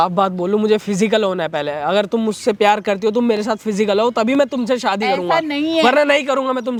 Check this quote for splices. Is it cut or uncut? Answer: uncut